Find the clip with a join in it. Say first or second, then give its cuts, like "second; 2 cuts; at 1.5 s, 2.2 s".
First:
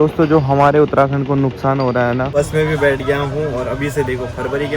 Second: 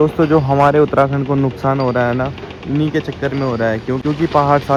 first; 1 cut; at 2.3 s